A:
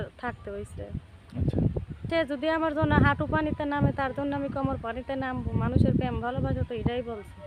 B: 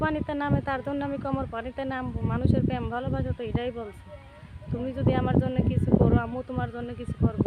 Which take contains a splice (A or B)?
A